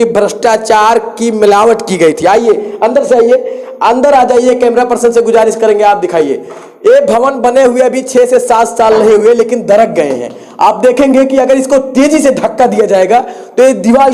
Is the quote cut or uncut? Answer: uncut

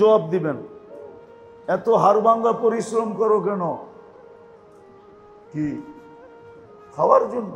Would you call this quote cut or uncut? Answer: uncut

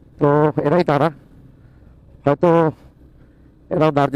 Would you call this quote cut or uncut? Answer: uncut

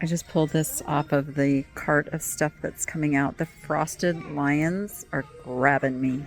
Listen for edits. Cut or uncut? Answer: uncut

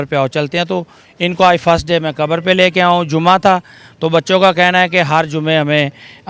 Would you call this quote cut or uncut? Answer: uncut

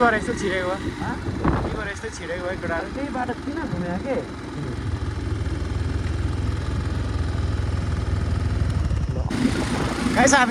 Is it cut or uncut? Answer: uncut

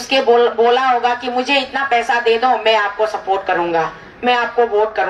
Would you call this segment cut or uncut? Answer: uncut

